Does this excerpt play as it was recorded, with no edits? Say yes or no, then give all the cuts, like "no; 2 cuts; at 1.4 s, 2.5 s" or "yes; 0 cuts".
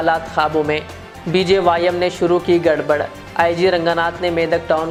yes; 0 cuts